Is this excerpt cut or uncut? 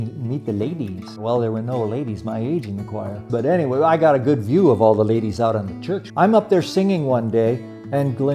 cut